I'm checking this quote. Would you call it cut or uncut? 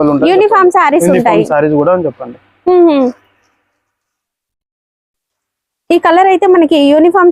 uncut